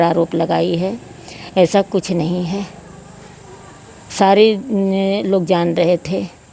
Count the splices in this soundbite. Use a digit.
0